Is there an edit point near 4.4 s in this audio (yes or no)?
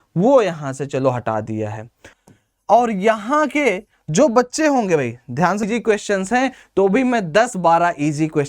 no